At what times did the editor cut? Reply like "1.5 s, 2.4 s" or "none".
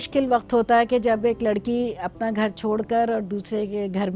none